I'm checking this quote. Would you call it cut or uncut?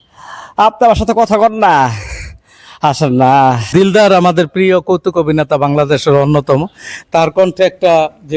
cut